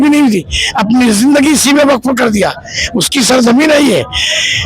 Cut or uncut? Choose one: uncut